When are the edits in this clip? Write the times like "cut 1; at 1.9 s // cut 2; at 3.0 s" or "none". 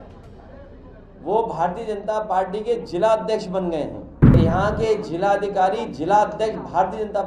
cut 1; at 4.3 s

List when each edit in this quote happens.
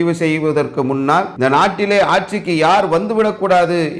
cut 1; at 1.3 s

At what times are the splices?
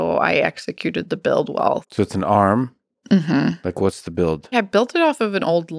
cut 1; at 1.9 s // cut 2; at 4.5 s

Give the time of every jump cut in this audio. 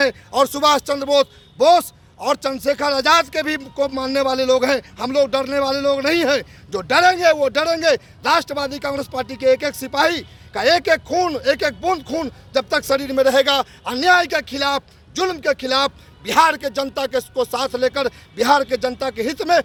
none

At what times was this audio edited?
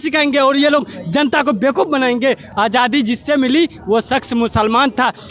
cut 1; at 2.5 s

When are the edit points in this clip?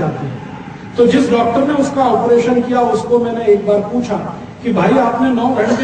none

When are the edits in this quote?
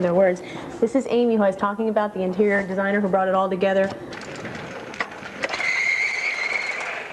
none

